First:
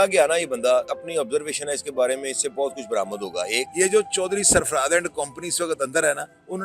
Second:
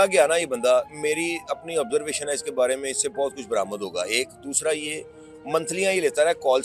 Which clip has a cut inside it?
first; 2 cuts; at 0.9 s, 3.7 s

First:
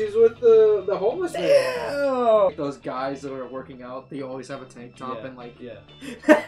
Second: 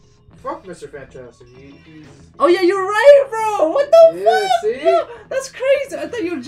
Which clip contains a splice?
first; 1 cut; at 2.5 s

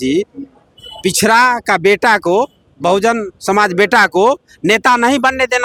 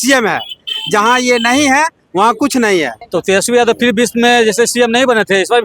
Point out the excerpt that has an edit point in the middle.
second; 1 cut; at 3.0 s

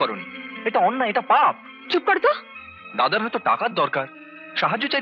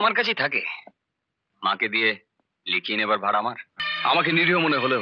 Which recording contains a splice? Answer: second; 1 cut; at 3.7 s

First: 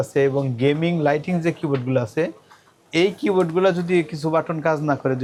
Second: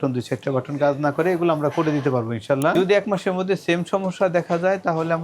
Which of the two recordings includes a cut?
second; 1 cut; at 2.7 s

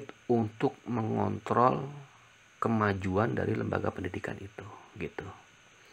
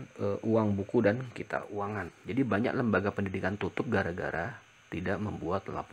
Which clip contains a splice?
second; 1 cut; at 1.7 s

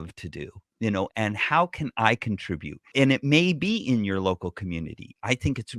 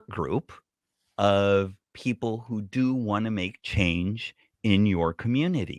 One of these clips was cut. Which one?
first; 2 cuts; at 1.1 s, 2.9 s

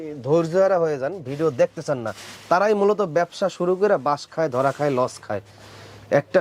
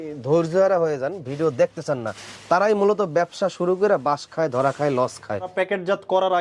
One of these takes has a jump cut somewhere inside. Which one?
second; 1 cut; at 5.5 s

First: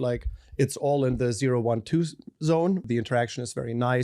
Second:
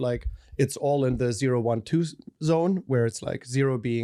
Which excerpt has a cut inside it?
first; 1 cut; at 2.8 s

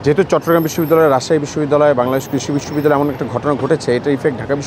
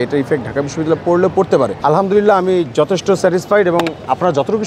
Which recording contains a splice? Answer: second; 1 cut; at 1.8 s

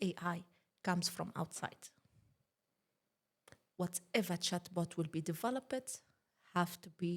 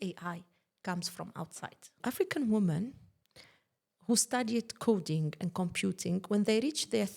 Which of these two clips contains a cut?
second; 1 cut; at 1.9 s

